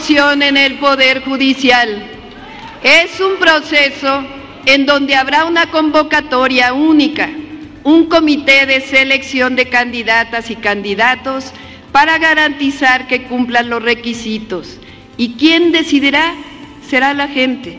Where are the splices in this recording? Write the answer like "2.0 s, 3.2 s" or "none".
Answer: none